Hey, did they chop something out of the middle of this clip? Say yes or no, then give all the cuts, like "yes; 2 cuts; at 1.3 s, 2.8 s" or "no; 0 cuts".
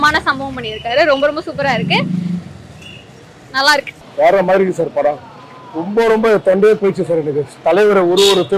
yes; 1 cut; at 4.0 s